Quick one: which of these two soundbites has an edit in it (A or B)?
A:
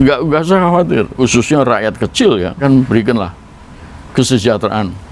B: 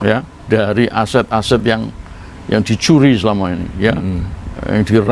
A